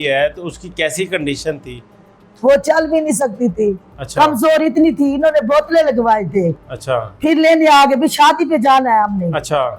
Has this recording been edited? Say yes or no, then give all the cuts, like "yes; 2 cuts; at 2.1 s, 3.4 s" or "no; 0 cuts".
no; 0 cuts